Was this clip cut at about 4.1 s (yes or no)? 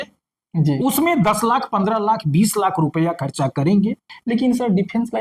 yes